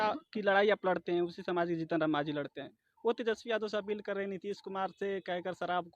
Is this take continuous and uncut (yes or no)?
yes